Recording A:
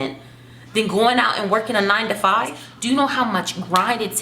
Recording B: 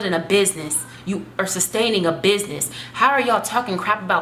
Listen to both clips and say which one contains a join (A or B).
A